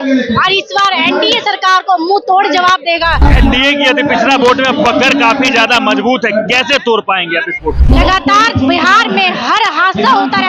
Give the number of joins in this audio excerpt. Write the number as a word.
two